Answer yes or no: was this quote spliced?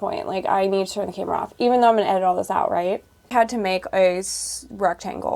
yes